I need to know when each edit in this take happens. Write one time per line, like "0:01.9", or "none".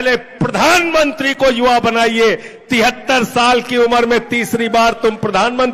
none